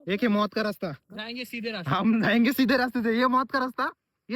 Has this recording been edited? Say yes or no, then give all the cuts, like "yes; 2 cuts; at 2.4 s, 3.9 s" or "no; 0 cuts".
yes; 1 cut; at 1.0 s